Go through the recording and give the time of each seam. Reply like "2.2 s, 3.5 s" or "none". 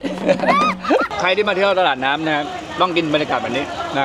1.1 s